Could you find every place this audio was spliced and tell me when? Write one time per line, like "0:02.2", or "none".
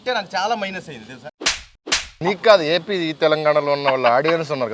0:02.2